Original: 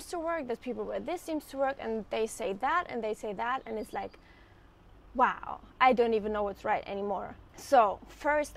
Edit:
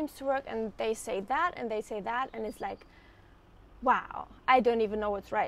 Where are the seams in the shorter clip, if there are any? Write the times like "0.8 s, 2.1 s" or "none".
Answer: none